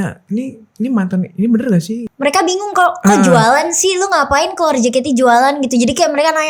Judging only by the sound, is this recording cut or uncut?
cut